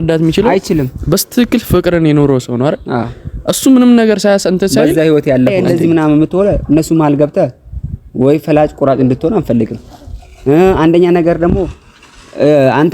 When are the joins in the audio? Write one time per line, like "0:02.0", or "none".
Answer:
0:05.5